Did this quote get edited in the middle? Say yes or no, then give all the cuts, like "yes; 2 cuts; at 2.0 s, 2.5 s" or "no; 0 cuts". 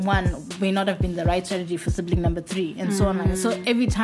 no; 0 cuts